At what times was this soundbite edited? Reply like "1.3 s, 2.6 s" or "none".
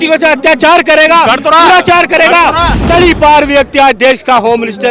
2.7 s